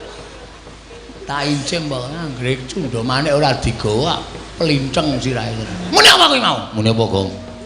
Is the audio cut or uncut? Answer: cut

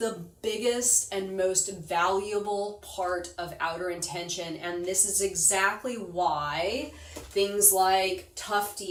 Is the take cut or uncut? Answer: uncut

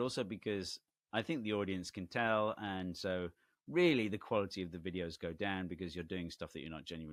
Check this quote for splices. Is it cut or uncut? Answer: uncut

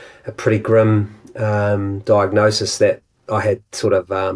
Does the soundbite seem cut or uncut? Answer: uncut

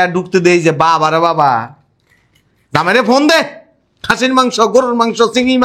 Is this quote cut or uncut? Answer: uncut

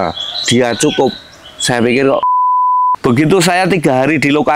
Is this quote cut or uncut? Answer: cut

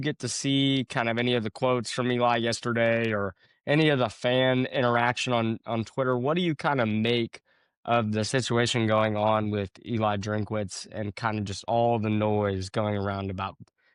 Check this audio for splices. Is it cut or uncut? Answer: uncut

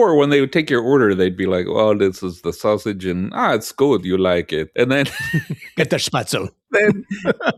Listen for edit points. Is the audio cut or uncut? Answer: uncut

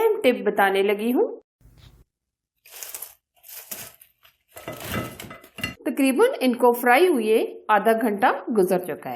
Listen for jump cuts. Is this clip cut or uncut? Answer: cut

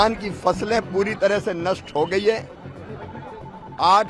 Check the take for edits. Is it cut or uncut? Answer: uncut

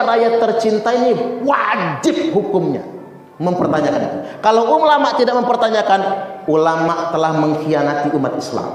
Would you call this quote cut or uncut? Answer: uncut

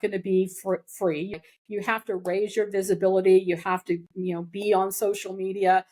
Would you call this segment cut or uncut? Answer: cut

